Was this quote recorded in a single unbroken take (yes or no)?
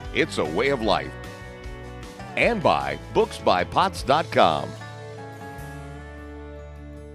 yes